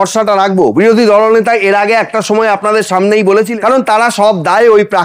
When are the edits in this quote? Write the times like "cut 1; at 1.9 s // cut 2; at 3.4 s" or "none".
cut 1; at 3.5 s